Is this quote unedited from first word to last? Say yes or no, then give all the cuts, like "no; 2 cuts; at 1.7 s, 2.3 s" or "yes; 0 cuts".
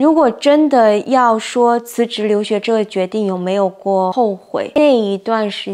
no; 2 cuts; at 1.0 s, 4.2 s